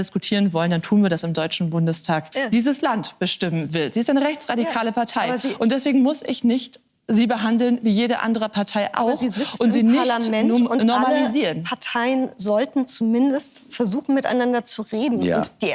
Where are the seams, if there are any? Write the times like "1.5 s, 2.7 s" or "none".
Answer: 2.3 s